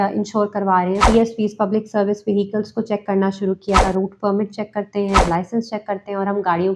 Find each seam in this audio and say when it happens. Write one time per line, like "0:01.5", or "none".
0:01.0
0:03.8
0:05.2